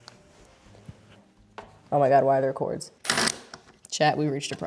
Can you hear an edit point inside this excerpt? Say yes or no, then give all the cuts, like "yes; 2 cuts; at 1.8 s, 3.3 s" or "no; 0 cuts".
yes; 1 cut; at 2.9 s